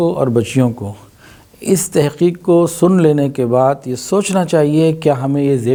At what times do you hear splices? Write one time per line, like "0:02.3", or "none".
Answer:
none